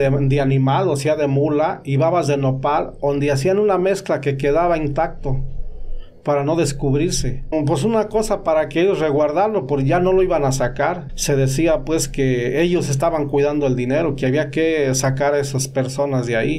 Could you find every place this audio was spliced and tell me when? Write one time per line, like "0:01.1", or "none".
0:07.5
0:11.1

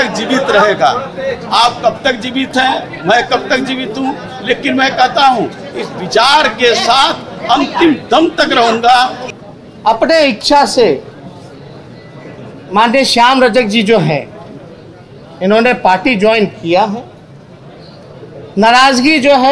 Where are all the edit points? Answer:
0:09.3

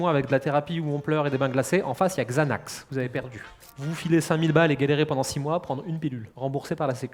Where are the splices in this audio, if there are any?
none

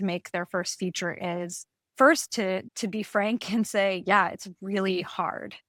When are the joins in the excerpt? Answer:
none

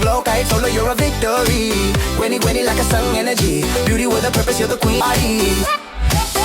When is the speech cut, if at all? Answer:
0:05.0

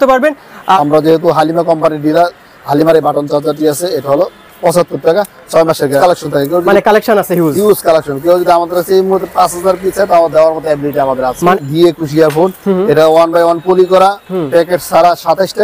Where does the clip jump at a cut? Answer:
0:00.8
0:06.0
0:11.5

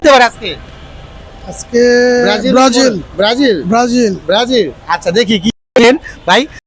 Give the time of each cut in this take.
0:05.5

